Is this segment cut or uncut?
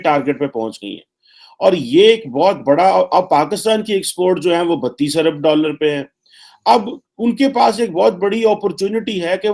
uncut